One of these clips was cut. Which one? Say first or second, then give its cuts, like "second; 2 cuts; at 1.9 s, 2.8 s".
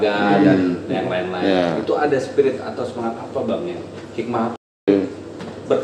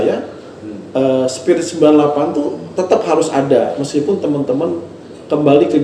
first; 1 cut; at 4.9 s